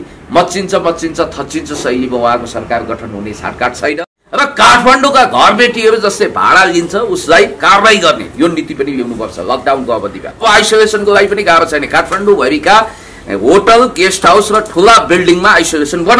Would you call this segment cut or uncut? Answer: cut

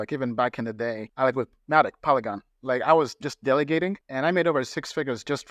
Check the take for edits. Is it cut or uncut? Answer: cut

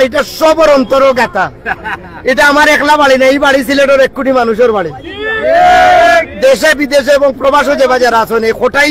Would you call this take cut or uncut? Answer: uncut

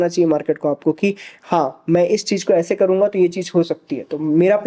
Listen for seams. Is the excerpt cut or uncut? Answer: uncut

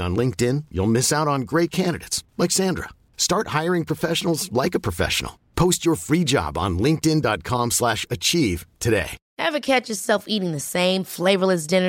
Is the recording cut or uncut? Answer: cut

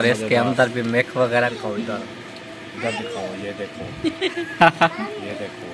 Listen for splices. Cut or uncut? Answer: cut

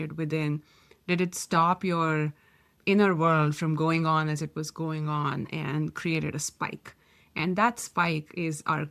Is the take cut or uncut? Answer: uncut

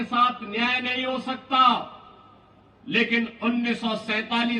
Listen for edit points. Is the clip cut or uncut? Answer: uncut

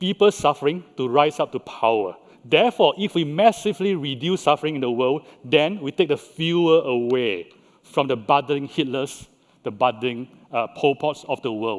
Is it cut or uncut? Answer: uncut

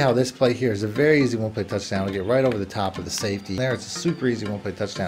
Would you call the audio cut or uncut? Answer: cut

